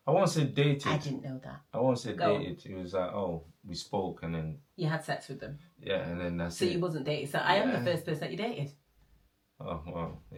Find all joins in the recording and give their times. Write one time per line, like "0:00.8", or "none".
none